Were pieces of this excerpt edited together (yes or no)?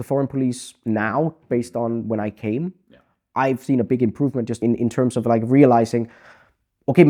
no